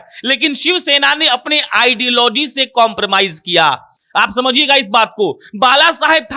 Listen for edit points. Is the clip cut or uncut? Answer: uncut